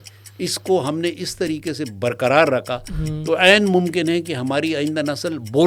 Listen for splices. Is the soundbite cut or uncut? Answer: uncut